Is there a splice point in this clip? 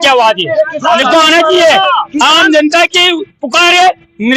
yes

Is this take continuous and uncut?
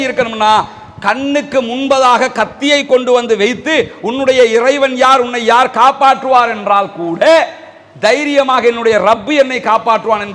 yes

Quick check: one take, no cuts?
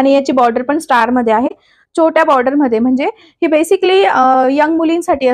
yes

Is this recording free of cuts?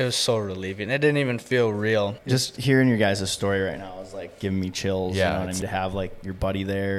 no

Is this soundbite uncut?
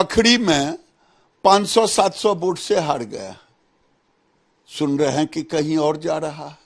yes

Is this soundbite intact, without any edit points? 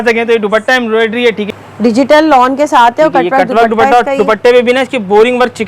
no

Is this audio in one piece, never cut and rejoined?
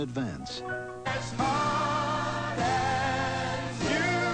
yes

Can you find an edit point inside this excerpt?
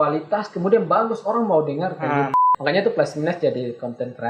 yes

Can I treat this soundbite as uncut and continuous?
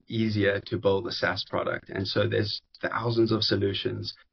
yes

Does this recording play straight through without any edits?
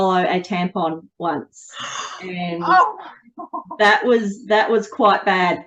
yes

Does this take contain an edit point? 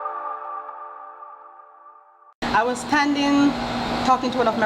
yes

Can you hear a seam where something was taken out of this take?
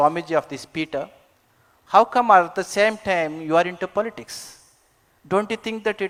no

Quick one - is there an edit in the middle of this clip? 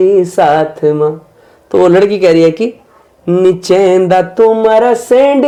no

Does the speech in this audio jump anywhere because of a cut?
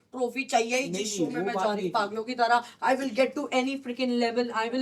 no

